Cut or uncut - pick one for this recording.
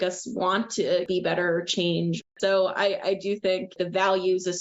cut